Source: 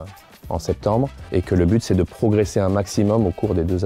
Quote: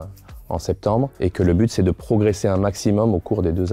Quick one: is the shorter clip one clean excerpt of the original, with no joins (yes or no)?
no